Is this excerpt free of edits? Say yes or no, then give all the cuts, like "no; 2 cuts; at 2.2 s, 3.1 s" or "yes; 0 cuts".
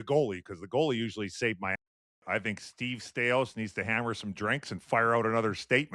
no; 1 cut; at 2.2 s